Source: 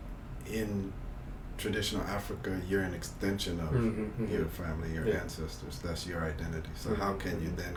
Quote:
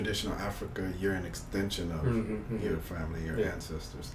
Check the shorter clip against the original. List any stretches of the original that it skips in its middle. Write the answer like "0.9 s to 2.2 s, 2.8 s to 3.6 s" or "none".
none